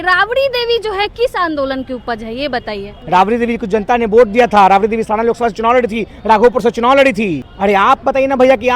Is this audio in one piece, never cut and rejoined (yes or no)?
no